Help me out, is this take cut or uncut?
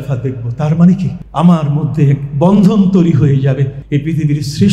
cut